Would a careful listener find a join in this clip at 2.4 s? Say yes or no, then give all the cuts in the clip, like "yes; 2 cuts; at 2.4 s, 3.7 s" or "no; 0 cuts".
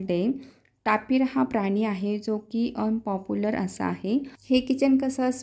no; 1 cut; at 4.3 s